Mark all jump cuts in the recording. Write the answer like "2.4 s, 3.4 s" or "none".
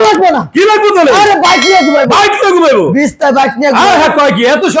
none